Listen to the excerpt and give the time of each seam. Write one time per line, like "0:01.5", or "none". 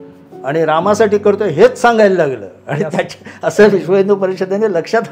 none